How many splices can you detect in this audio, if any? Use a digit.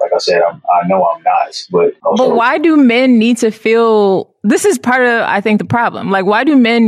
0